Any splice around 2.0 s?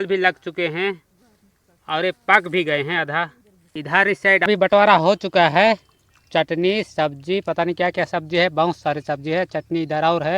no; 1 cut; at 4.5 s

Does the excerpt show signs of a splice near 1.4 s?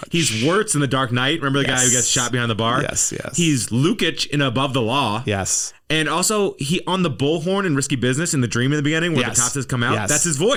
no; 0 cuts

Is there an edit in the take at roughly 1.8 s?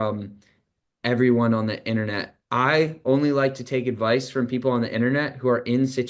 no; 0 cuts

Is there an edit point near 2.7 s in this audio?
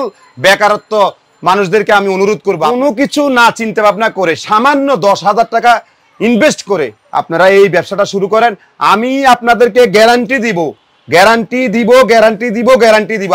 yes; 1 cut; at 2.7 s

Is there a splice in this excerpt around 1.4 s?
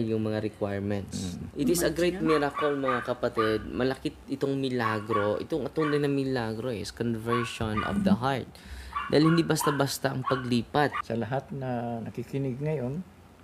yes; 2 cuts; at 1.4 s, 11.0 s

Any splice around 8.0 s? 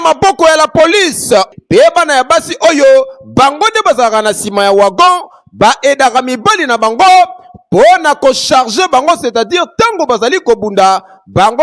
no; 1 cut; at 1.5 s

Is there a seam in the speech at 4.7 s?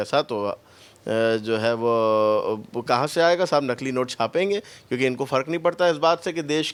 no; 0 cuts

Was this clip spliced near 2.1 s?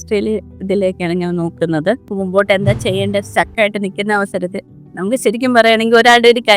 yes; 1 cut; at 2.1 s

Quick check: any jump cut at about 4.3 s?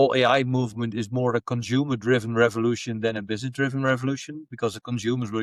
no; 0 cuts

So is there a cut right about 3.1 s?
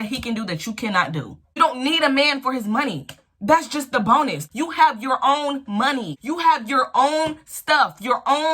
no; 3 cuts; at 1.6 s, 4.4 s, 6.1 s

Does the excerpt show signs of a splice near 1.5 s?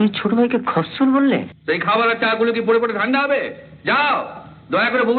yes; 1 cut; at 1.5 s

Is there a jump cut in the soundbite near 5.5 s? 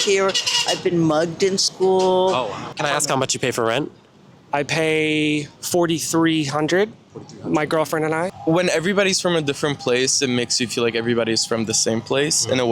yes; 3 cuts; at 2.6 s, 5.5 s, 8.3 s

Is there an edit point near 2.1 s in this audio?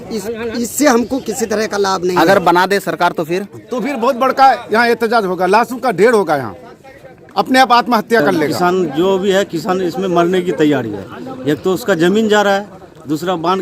yes; 2 cuts; at 2.1 s, 8.5 s

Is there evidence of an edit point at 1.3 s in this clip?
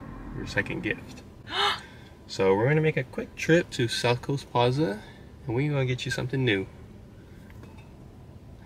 no; 0 cuts

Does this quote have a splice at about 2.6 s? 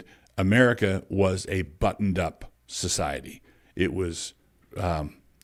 no; 0 cuts

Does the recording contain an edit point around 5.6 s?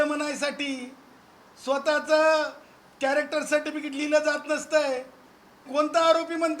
yes; 1 cut; at 5.6 s

